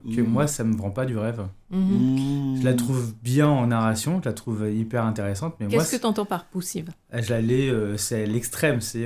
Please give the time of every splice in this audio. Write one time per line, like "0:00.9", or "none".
none